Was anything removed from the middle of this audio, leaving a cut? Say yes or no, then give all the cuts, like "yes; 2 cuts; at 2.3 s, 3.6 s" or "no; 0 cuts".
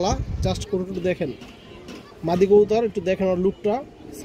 no; 0 cuts